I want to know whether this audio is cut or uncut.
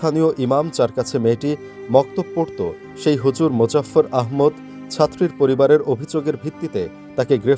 uncut